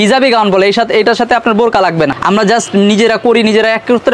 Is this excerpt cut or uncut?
cut